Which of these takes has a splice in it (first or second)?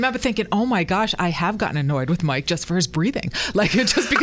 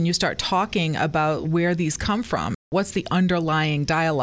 second